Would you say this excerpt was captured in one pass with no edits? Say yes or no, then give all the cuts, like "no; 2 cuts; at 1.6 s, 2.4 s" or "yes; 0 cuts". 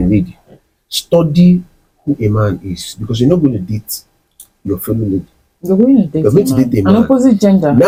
yes; 0 cuts